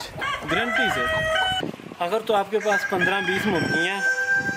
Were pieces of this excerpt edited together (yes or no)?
yes